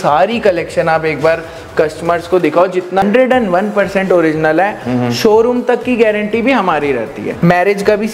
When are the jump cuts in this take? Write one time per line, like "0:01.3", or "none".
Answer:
0:03.0
0:07.3